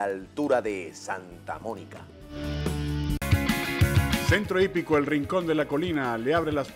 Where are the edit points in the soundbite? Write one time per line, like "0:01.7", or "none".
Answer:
0:03.2